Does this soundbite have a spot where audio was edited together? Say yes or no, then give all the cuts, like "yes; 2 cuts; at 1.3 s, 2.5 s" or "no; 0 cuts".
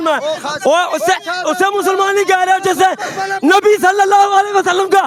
no; 0 cuts